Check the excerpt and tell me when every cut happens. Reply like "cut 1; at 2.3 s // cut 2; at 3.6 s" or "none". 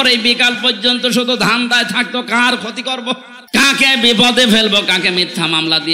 cut 1; at 3.3 s